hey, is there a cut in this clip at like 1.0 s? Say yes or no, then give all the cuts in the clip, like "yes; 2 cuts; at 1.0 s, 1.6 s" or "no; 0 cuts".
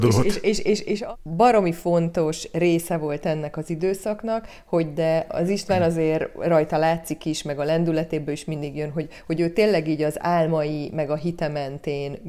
yes; 1 cut; at 1.0 s